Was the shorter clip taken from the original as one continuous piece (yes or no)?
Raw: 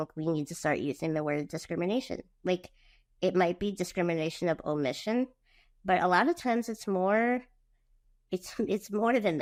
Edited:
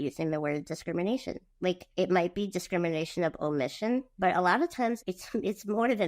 no